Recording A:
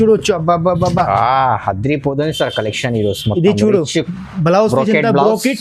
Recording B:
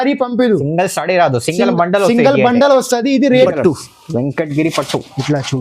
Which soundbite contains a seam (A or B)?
B